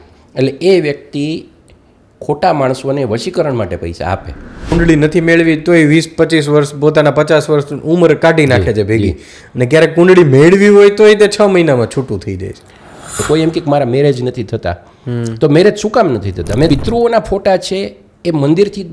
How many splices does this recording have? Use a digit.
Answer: 3